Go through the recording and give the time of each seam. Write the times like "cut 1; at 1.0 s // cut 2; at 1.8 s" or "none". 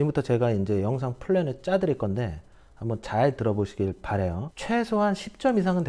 none